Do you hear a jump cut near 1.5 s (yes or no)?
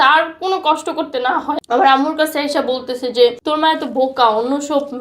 yes